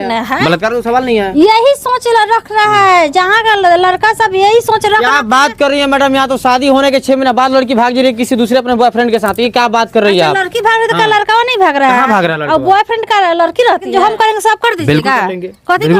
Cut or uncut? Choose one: cut